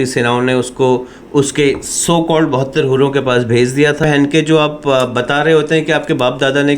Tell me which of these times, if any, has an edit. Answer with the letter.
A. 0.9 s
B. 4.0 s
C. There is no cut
B